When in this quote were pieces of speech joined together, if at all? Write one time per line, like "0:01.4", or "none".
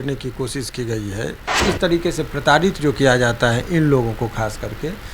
0:01.6